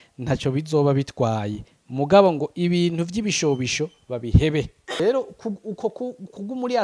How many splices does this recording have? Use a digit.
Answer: 1